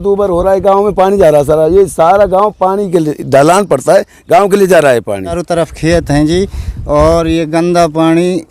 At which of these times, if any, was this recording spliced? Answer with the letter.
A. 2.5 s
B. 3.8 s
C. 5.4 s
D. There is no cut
C